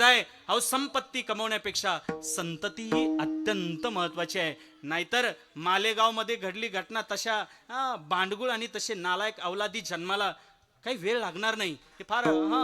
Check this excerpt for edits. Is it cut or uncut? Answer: uncut